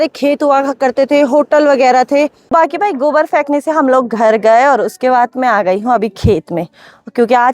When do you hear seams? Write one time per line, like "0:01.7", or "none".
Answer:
0:02.5